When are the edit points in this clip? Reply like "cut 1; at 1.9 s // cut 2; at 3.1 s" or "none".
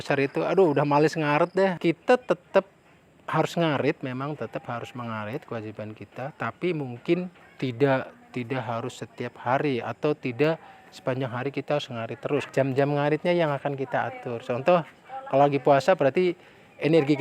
cut 1; at 1.8 s // cut 2; at 7.4 s // cut 3; at 12.5 s